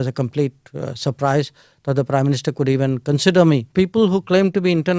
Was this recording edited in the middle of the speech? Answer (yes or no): yes